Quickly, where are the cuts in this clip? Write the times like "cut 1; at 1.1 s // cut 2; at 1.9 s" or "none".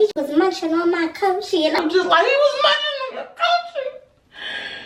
none